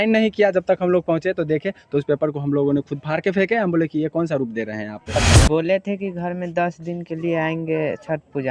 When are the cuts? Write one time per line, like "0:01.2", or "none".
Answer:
0:05.2